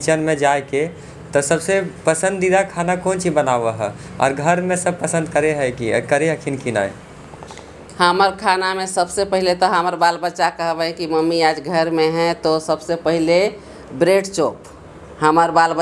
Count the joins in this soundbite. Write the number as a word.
zero